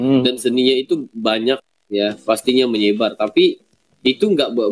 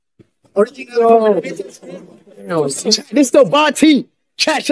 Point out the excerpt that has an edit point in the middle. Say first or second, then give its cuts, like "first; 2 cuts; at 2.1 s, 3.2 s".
second; 1 cut; at 2.5 s